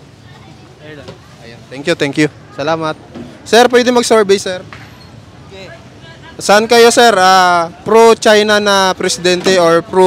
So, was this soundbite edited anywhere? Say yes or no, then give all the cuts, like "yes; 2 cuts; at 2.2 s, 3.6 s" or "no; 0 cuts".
no; 0 cuts